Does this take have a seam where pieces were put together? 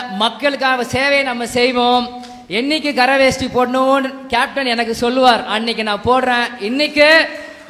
no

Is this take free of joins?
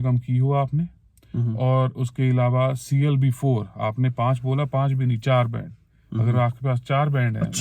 yes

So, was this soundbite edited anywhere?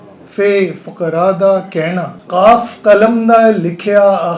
yes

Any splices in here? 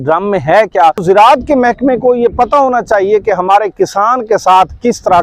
yes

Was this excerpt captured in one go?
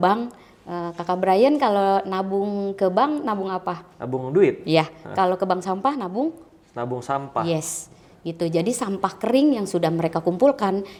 yes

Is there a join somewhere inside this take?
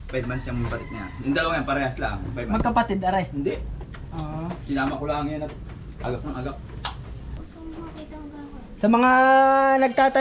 yes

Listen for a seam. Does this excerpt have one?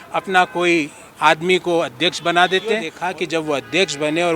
yes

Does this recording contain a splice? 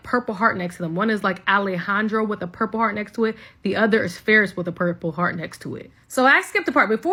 no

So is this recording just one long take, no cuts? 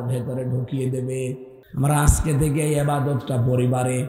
no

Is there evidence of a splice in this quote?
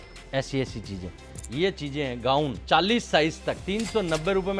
yes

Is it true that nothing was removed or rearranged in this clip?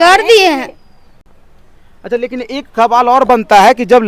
yes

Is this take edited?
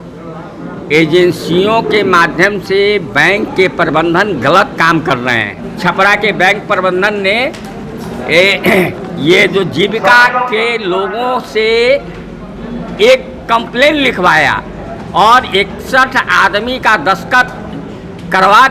yes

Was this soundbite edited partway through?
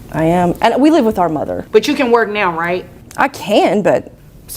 yes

